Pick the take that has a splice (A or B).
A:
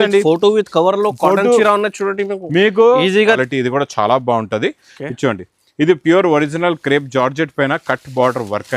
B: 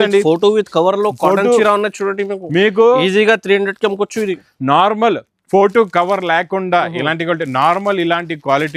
A